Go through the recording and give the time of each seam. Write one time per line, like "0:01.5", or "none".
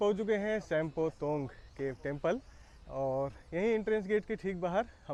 none